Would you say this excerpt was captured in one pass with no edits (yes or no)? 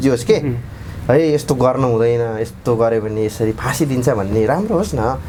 yes